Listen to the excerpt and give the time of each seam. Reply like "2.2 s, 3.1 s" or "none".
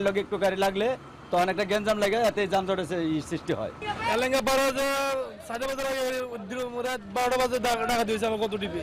none